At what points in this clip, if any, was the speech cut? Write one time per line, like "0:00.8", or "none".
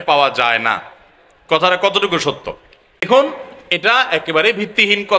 0:03.1